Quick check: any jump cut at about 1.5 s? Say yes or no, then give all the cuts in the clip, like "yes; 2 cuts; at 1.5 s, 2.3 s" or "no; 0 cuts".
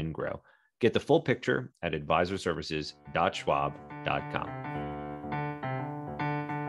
no; 1 cut; at 4.5 s